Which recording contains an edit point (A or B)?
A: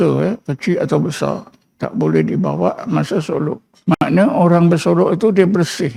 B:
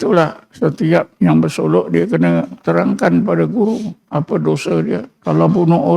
B